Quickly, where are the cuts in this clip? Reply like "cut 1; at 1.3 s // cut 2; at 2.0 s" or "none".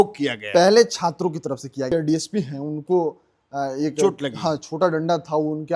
cut 1; at 1.9 s